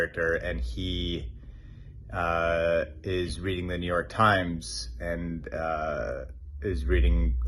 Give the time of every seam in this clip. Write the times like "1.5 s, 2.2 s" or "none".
none